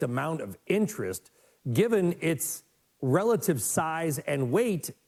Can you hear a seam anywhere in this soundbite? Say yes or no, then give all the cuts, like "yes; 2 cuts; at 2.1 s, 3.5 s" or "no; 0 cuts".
no; 0 cuts